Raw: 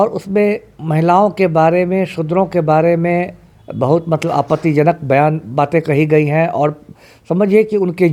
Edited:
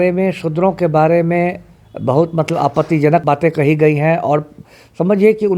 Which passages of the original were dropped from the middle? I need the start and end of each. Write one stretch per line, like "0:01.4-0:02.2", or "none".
0:05.0-0:05.5